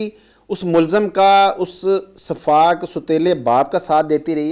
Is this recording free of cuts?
yes; 0 cuts

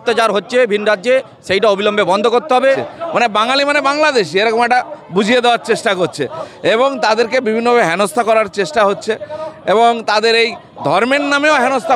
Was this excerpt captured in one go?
no; 1 cut; at 2.6 s

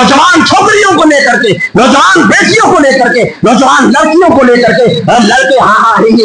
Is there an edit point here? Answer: no; 0 cuts

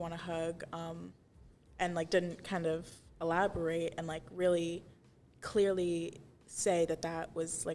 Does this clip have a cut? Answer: no; 0 cuts

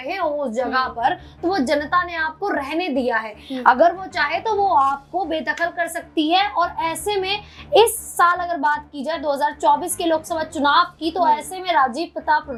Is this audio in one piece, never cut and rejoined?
yes; 0 cuts

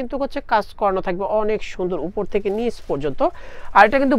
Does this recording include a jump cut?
no; 0 cuts

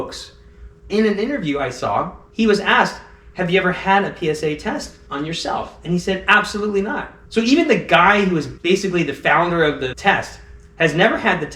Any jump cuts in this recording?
yes; 3 cuts; at 0.9 s, 5.0 s, 7.2 s

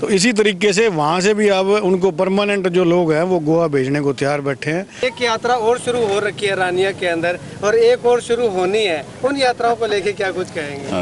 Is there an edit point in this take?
yes; 1 cut; at 5.0 s

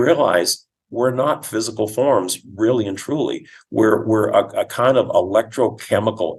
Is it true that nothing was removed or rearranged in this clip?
yes; 0 cuts

